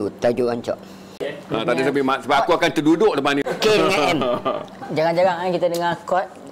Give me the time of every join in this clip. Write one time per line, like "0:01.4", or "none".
0:01.2
0:03.4

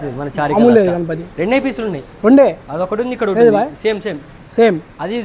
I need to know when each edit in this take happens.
none

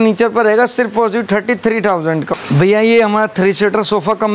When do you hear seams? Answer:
0:02.3

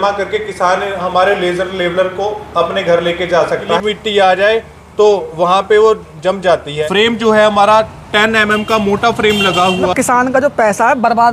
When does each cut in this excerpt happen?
0:03.8
0:06.8
0:09.9

